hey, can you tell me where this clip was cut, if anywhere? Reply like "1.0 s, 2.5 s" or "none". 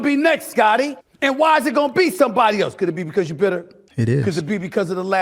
1.0 s, 3.8 s

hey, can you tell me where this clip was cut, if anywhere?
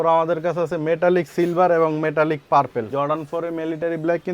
2.9 s

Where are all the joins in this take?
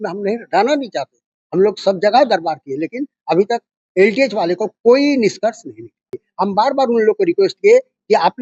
6.2 s

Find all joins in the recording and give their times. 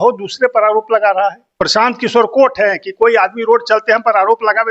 1.5 s

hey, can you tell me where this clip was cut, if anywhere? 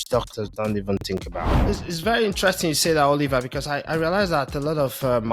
1.6 s

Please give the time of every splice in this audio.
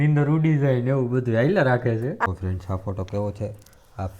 2.3 s

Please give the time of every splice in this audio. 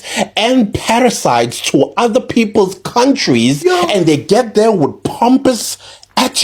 none

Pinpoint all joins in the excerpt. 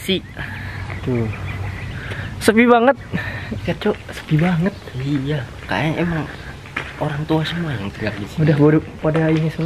3.6 s

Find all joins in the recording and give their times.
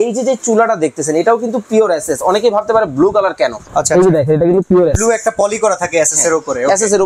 none

